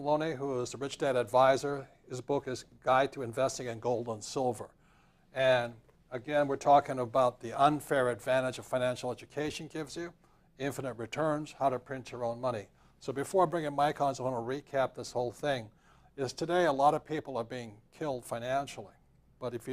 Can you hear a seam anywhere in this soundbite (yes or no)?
yes